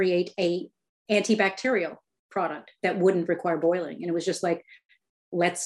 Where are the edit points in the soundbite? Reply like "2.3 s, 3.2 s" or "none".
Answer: none